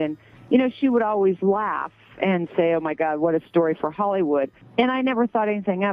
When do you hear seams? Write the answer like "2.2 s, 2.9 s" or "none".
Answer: 4.6 s